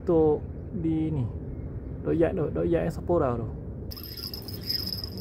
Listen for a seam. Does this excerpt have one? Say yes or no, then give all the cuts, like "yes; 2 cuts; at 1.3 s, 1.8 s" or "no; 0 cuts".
yes; 1 cut; at 3.9 s